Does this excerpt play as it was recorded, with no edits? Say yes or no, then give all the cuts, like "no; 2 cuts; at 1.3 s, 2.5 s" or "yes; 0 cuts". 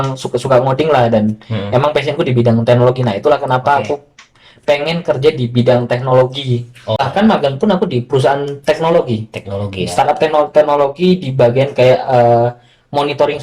no; 1 cut; at 7.0 s